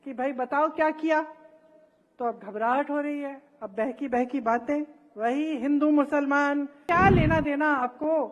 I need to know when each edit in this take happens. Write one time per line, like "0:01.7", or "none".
0:06.8